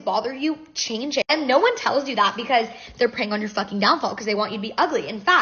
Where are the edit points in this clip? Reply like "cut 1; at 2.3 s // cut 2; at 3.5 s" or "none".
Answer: none